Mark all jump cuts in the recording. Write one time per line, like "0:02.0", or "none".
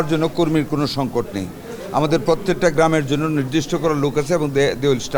none